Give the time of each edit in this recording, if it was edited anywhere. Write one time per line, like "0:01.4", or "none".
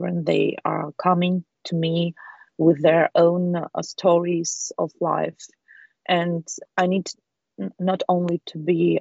0:06.5

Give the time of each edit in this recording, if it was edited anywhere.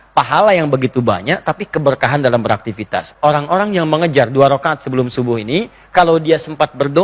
0:03.1

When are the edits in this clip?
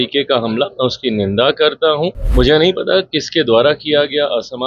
0:02.2

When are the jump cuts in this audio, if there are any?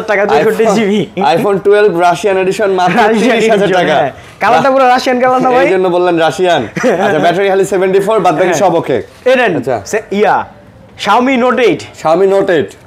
none

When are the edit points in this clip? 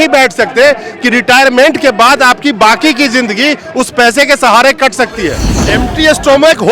0:05.7

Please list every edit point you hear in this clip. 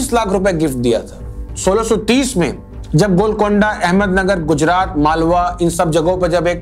0:01.5

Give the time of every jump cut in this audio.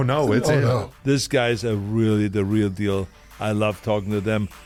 none

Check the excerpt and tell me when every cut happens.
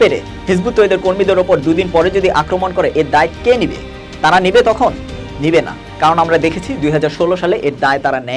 none

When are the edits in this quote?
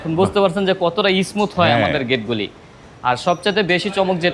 none

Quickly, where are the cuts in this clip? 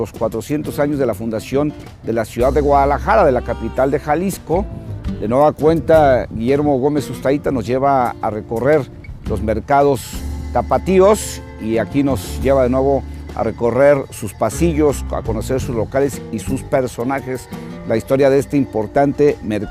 0:10.9

